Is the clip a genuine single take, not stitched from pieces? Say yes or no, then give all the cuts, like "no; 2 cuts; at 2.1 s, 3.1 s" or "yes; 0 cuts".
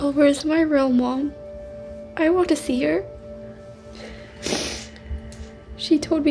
yes; 0 cuts